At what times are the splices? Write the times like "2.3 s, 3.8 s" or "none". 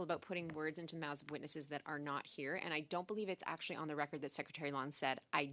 none